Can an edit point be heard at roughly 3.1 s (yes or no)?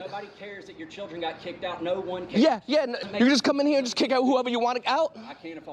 yes